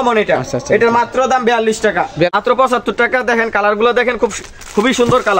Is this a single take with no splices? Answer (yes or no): no